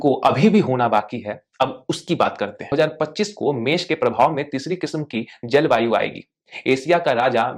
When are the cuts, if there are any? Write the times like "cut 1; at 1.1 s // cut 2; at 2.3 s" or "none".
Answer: cut 1; at 2.7 s

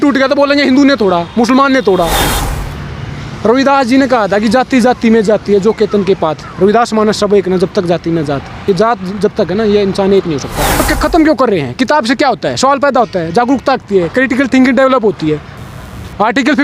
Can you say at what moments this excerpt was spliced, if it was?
cut 1; at 2.3 s // cut 2; at 10.7 s

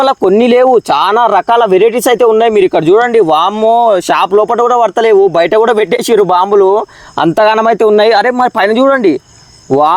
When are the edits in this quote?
none

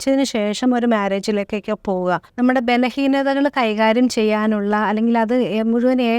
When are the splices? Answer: cut 1; at 2.3 s

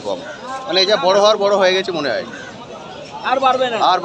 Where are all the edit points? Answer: none

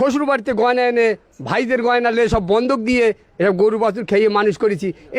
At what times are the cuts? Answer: none

